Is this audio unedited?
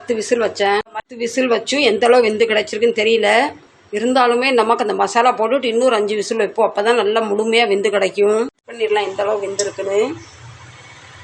yes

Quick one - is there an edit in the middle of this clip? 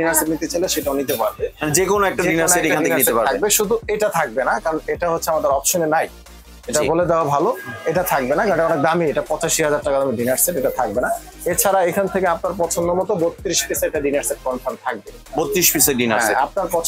no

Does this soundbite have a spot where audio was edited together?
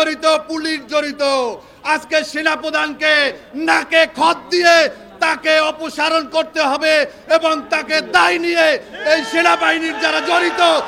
no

